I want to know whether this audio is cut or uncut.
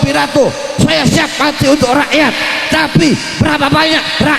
uncut